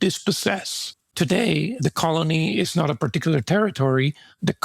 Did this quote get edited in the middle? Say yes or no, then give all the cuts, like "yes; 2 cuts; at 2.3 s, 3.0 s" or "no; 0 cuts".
yes; 1 cut; at 1.0 s